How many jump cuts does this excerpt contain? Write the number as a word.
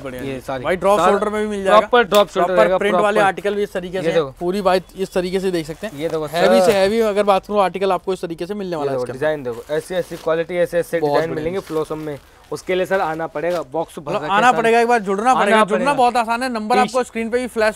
zero